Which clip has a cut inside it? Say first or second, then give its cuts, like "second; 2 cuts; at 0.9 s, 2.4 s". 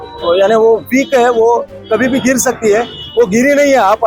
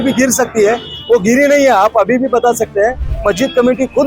second; 1 cut; at 3.1 s